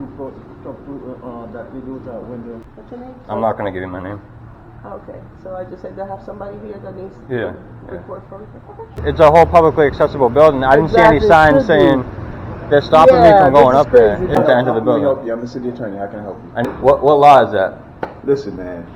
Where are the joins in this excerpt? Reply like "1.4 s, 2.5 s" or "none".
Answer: 2.7 s, 9.0 s, 14.3 s, 16.7 s